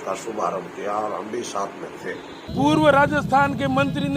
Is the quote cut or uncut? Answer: cut